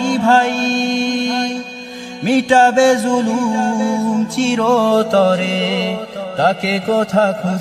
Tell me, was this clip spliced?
no; 0 cuts

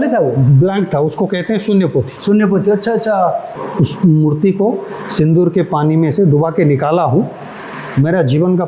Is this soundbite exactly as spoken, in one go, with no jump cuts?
no; 1 cut; at 3.5 s

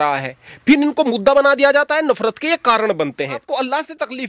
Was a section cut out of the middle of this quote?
yes; 1 cut; at 3.4 s

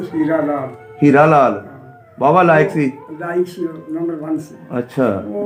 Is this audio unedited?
yes; 0 cuts

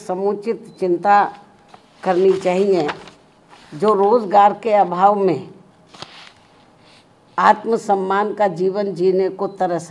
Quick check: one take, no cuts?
yes; 0 cuts

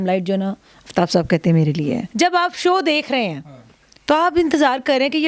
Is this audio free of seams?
no; 1 cut; at 2.1 s

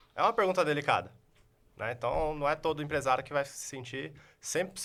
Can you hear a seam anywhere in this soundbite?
no; 0 cuts

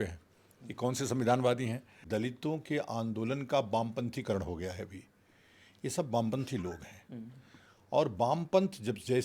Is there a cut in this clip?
yes; 1 cut; at 2.0 s

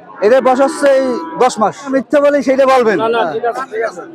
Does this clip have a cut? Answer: yes; 1 cut; at 1.9 s

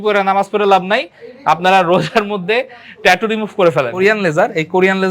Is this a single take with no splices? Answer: no; 1 cut; at 3.9 s

